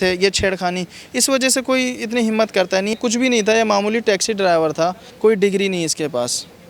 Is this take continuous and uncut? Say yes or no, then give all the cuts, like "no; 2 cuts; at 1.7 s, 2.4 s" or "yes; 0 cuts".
no; 2 cuts; at 3.0 s, 5.0 s